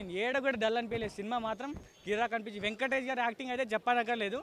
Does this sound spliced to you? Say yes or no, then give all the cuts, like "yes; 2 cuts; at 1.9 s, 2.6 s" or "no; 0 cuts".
no; 0 cuts